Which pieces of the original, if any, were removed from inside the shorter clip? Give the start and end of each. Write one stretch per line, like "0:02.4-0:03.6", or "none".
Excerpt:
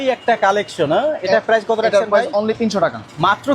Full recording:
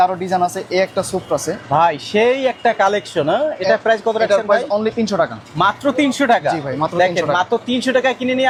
none